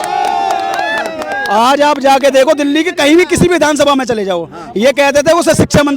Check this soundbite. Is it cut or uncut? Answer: uncut